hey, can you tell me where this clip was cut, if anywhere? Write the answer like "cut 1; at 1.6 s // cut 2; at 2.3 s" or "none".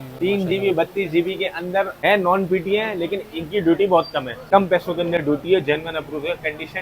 cut 1; at 1.9 s // cut 2; at 4.3 s